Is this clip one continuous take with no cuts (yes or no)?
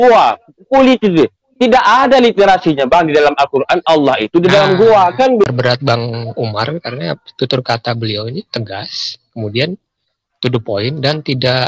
no